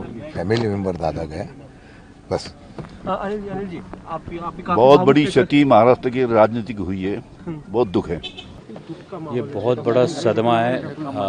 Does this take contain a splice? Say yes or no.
no